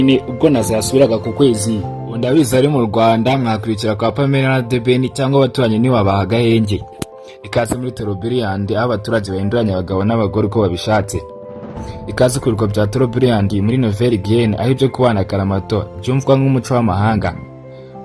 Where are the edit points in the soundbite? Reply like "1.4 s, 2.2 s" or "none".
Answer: 2.2 s